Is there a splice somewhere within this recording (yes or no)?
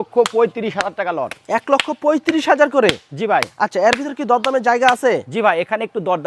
no